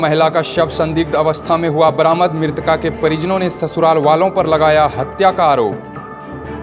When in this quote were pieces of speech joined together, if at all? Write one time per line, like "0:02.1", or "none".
none

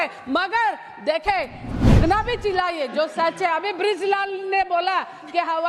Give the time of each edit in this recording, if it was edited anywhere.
0:01.6

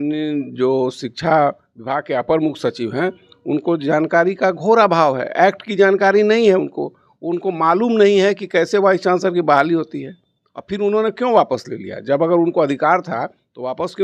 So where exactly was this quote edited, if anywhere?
none

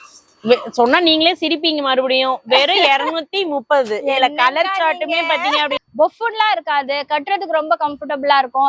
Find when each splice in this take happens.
0:05.8

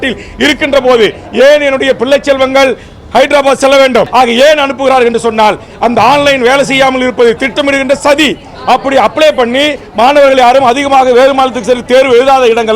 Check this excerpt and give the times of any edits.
0:04.1

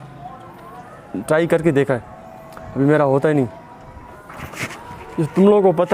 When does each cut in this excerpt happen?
0:04.1

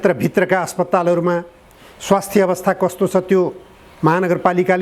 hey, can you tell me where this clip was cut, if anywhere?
none

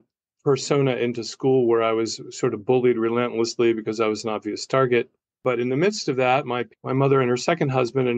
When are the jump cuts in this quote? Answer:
0:05.2

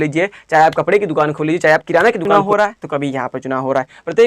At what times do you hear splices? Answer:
0:02.2

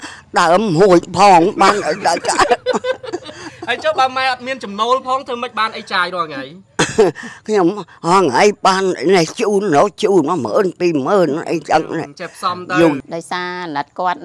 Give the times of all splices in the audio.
0:13.0

